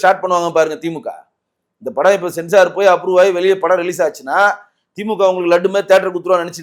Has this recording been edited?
no; 0 cuts

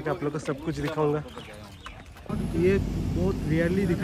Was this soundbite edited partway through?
yes; 1 cut; at 2.2 s

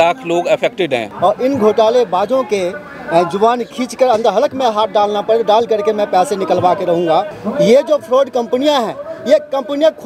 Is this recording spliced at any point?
yes; 2 cuts; at 1.1 s, 7.4 s

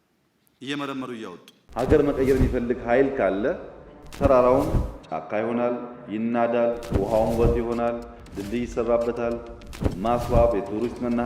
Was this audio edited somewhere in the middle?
yes; 1 cut; at 1.7 s

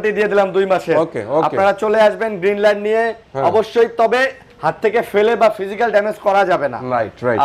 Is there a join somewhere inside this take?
no; 0 cuts

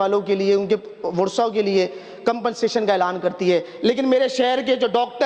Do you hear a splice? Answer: no; 0 cuts

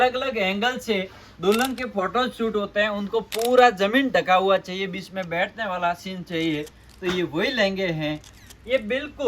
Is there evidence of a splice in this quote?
yes; 1 cut; at 8.3 s

